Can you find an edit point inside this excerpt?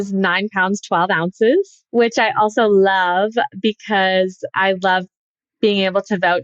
yes; 1 cut; at 1.8 s

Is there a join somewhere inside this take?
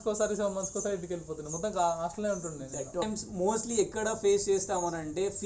yes; 1 cut; at 3.0 s

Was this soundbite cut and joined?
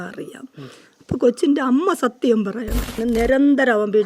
yes; 1 cut; at 3.0 s

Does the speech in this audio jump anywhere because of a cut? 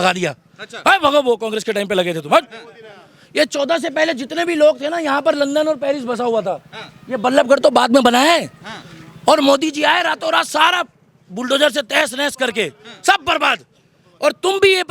no; 0 cuts

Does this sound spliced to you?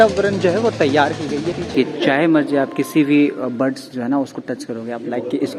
yes; 1 cut; at 1.7 s

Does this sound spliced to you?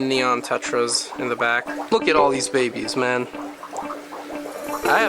yes; 1 cut; at 1.7 s

